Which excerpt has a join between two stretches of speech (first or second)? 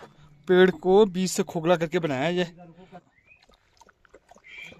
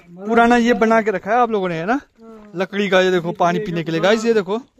first